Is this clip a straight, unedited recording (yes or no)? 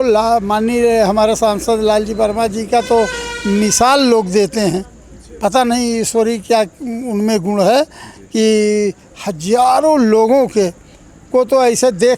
yes